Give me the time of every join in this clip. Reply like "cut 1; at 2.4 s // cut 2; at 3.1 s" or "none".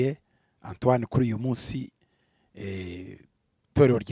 none